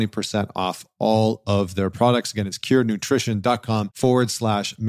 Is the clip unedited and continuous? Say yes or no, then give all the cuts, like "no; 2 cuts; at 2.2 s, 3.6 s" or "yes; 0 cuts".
no; 1 cut; at 3.9 s